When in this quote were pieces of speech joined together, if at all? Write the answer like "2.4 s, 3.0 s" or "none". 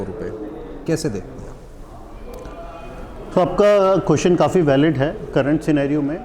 none